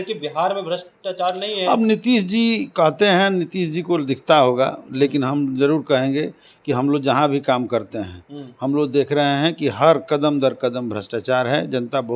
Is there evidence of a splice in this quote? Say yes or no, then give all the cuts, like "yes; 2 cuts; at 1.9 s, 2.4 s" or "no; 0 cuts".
no; 0 cuts